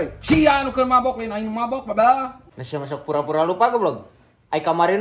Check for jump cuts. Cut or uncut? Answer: cut